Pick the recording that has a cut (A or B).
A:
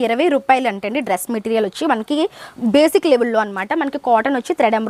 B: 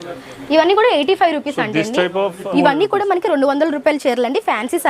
B